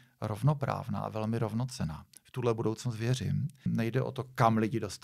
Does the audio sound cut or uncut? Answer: cut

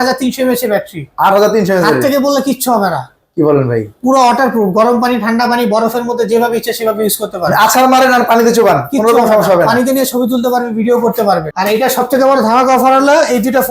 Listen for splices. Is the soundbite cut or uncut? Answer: cut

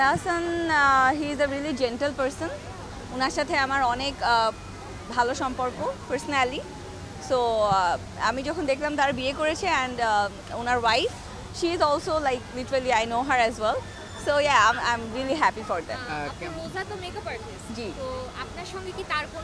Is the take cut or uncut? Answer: uncut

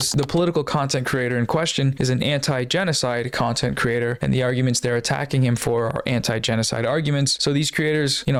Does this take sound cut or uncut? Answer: uncut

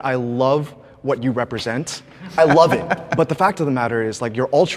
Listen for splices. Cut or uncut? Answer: cut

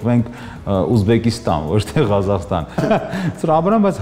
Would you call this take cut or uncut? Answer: cut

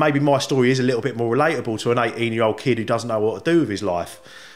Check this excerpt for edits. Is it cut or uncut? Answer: uncut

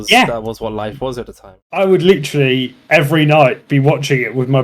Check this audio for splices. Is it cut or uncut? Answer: cut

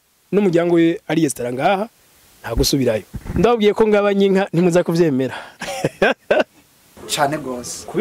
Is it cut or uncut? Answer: cut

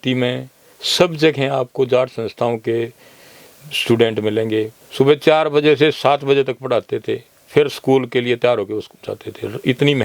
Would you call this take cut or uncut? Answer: cut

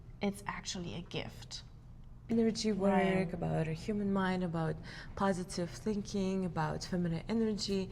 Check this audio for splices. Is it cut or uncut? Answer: cut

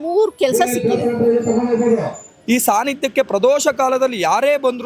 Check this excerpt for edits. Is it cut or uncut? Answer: cut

